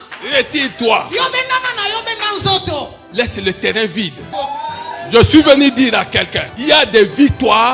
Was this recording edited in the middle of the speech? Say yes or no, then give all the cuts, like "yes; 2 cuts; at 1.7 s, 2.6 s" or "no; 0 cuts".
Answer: yes; 3 cuts; at 3.0 s, 4.3 s, 6.4 s